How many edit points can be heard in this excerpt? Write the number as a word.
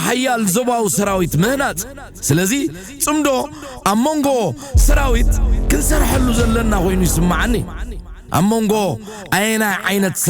zero